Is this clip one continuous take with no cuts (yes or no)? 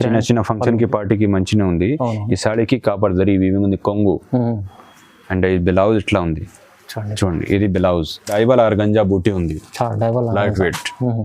no